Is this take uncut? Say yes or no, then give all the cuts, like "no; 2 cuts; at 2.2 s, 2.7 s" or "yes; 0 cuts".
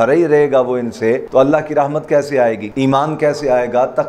no; 2 cuts; at 1.2 s, 2.7 s